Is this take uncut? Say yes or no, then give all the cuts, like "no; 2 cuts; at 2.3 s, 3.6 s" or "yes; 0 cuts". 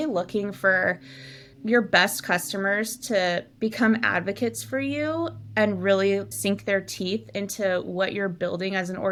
yes; 0 cuts